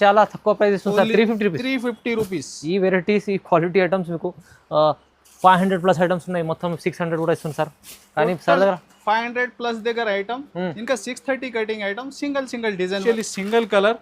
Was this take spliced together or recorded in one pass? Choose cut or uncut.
cut